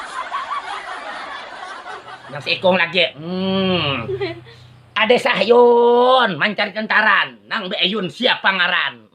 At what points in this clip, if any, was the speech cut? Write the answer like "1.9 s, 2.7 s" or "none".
1.4 s, 2.1 s